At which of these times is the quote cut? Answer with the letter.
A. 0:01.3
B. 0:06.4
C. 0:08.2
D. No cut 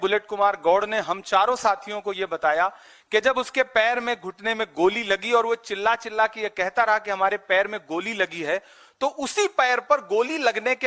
D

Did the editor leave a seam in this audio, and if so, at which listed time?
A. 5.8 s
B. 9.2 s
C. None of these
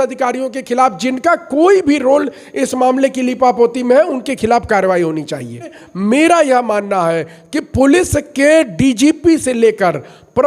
A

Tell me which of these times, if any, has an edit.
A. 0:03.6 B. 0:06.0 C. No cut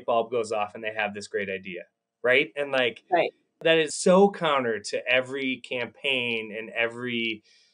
A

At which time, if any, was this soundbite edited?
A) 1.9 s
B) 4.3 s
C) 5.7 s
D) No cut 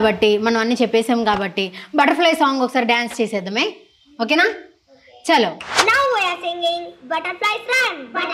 C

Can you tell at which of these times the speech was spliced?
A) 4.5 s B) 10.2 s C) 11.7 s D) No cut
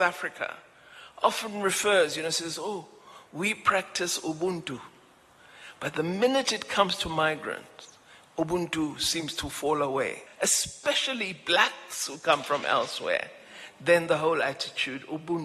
B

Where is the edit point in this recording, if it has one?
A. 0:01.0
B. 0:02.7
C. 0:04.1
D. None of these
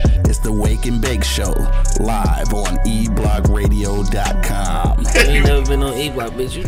D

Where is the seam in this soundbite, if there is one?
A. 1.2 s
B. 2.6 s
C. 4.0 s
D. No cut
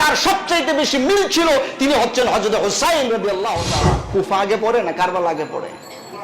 C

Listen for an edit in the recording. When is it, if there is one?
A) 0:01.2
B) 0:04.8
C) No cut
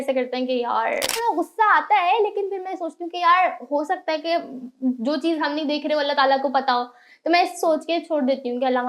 A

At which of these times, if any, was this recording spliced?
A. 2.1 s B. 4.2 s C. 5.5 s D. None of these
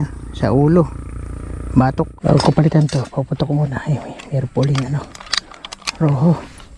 A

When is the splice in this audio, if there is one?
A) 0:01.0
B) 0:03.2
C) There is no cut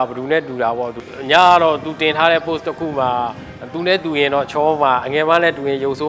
A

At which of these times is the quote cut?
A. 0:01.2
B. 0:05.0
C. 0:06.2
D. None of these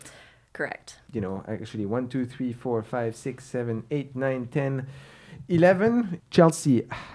C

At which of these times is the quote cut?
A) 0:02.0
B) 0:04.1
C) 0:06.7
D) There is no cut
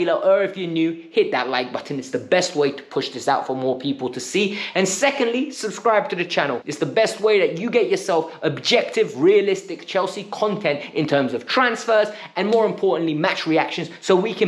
C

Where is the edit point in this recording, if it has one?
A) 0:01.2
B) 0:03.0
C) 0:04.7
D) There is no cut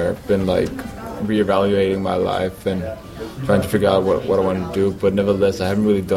D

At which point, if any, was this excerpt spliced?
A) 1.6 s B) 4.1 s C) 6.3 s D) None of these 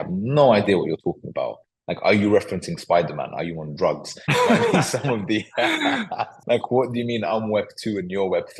C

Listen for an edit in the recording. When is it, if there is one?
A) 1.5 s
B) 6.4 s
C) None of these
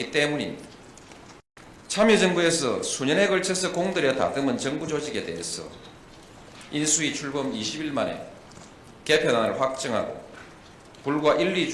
A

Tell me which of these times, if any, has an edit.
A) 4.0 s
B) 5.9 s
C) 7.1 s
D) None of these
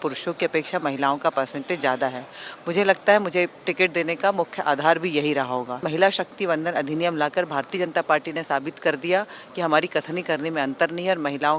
B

